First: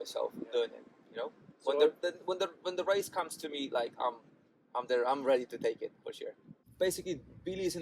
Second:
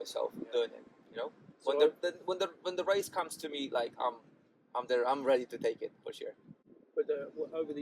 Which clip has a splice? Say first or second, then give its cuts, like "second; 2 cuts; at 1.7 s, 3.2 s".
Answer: first; 1 cut; at 6.6 s